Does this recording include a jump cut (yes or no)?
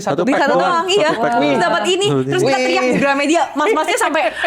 no